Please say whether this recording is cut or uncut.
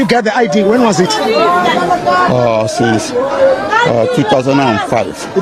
uncut